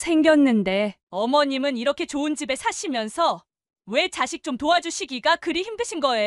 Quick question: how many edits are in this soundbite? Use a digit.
1